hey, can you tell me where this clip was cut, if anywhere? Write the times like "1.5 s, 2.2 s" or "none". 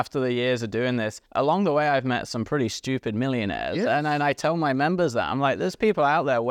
1.2 s